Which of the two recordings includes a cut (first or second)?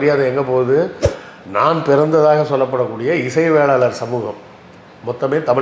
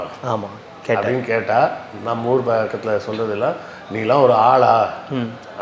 first